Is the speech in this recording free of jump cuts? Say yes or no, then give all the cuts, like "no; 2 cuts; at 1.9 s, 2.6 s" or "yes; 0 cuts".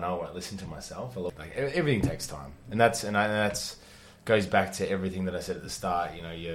no; 1 cut; at 1.3 s